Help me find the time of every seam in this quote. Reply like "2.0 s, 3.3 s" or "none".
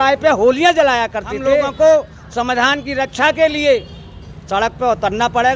1.7 s